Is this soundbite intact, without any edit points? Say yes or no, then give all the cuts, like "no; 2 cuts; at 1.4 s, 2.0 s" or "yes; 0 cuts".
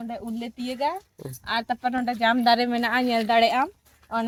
yes; 0 cuts